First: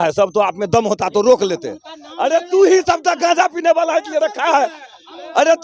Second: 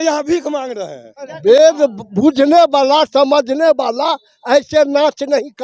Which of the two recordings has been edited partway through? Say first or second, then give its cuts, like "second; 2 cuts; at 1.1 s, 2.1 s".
second; 1 cut; at 1.6 s